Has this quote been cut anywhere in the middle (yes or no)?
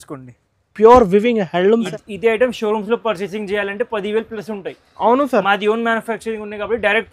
yes